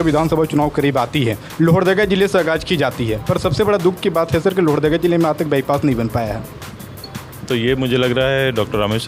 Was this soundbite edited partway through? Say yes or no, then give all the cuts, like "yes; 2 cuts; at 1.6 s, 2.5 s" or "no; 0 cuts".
no; 0 cuts